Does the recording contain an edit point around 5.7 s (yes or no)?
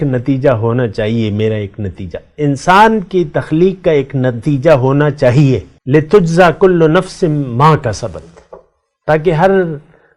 yes